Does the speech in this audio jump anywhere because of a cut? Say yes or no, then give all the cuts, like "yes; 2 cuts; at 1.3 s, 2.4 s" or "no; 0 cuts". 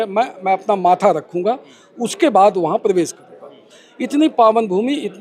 no; 0 cuts